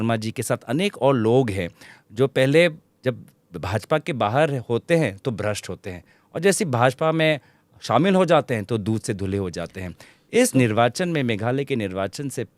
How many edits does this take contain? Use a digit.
0